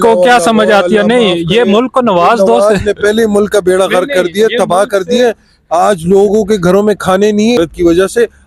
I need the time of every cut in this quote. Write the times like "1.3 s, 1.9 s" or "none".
none